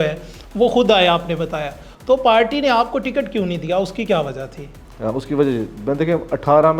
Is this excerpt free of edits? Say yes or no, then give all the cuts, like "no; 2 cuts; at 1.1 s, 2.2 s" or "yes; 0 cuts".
yes; 0 cuts